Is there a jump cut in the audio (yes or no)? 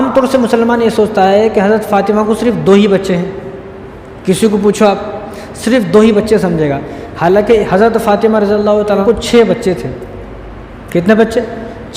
no